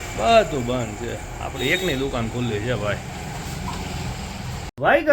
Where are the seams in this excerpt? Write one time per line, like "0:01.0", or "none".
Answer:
none